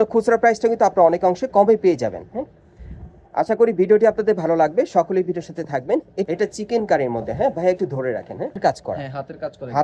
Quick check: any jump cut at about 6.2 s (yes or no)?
yes